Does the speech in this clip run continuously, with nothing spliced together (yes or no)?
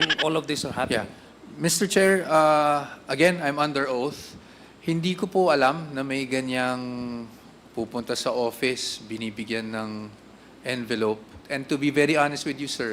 no